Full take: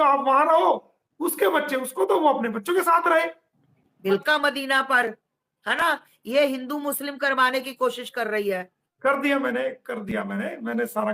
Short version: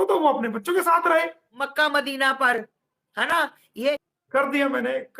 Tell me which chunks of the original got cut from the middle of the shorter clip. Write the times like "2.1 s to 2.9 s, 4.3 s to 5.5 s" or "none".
3.7 s to 4.2 s, 6.4 s to 8.6 s